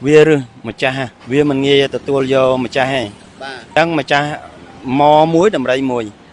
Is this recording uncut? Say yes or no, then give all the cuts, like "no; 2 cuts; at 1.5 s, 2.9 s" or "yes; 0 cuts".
no; 2 cuts; at 1.1 s, 3.6 s